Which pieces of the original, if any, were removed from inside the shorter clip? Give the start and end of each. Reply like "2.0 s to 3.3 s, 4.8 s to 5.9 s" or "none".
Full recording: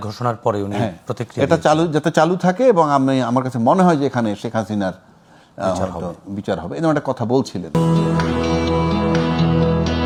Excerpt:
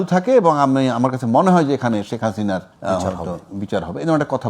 5.0 s to 5.5 s